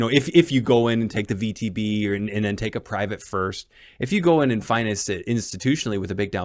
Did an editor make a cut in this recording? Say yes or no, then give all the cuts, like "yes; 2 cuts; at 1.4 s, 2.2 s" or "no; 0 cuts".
no; 0 cuts